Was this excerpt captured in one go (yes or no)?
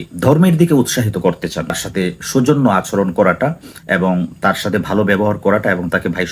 no